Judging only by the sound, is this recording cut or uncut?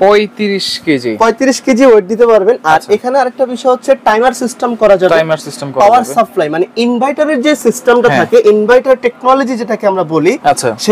uncut